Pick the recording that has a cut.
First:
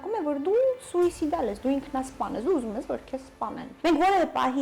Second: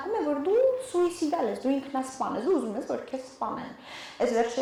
first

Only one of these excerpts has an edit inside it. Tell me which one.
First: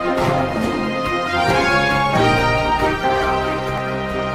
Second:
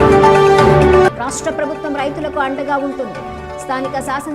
second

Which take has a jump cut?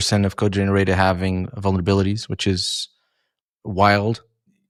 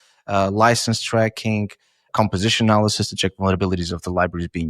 second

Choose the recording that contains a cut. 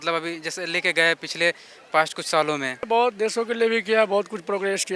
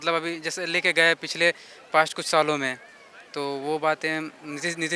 first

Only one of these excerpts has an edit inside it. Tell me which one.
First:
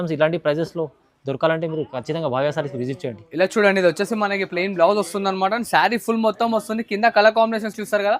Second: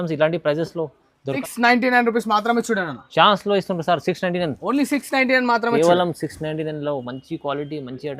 second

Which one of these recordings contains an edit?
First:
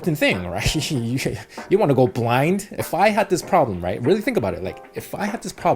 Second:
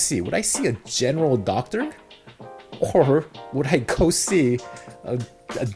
first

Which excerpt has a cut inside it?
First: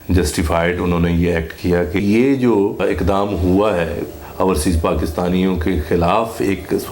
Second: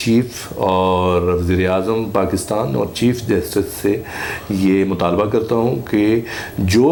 first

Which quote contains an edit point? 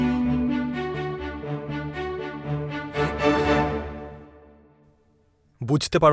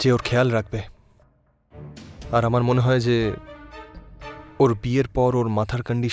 first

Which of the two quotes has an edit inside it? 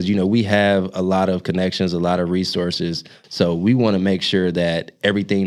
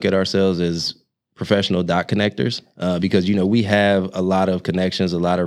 first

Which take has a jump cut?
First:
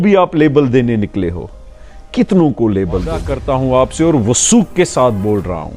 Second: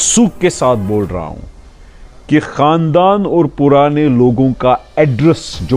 first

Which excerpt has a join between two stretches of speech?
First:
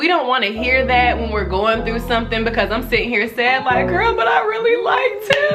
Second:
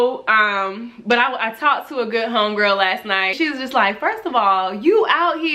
second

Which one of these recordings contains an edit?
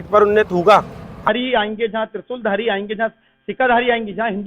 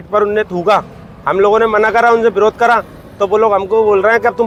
first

